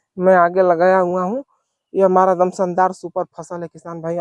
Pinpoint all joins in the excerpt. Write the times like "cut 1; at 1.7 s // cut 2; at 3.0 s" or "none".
none